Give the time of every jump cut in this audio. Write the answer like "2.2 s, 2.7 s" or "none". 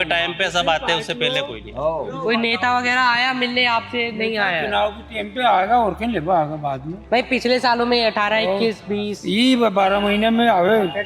2.2 s